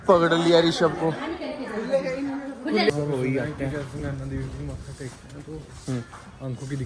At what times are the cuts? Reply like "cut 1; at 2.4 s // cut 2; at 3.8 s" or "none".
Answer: cut 1; at 2.9 s